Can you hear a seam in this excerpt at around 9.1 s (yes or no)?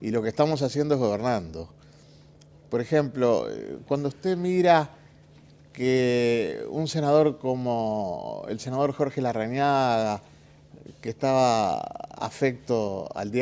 yes